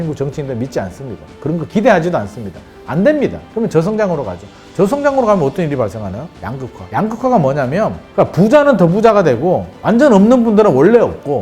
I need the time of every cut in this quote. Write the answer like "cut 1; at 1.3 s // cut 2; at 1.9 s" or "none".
cut 1; at 8.0 s